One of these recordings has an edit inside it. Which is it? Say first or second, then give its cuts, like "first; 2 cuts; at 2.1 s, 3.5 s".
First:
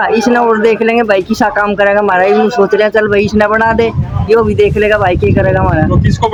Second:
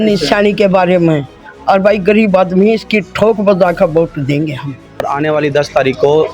second; 1 cut; at 5.0 s